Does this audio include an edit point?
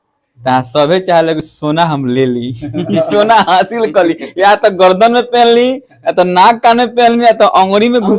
no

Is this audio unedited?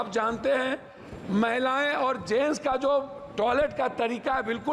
yes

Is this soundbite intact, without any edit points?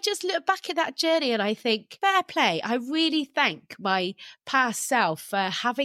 no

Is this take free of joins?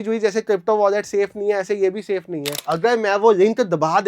no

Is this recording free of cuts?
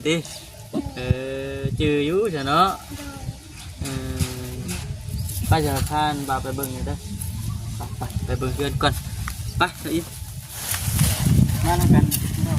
no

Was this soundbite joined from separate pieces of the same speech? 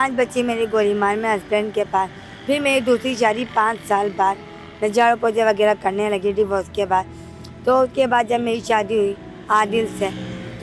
no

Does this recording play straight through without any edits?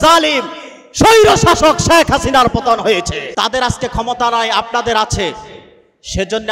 no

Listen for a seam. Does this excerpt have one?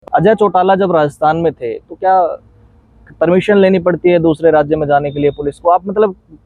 no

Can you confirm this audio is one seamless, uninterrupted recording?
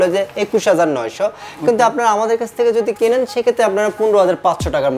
yes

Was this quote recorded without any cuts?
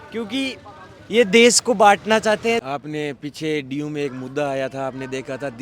no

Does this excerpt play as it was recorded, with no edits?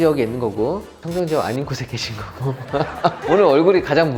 yes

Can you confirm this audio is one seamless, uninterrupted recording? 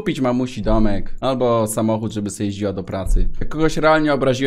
no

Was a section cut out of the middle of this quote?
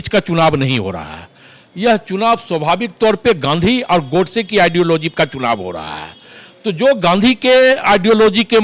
no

